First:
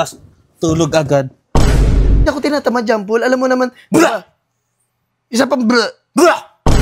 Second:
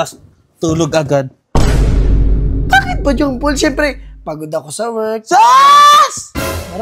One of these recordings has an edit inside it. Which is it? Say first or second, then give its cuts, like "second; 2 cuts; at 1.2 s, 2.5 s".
first; 1 cut; at 2.3 s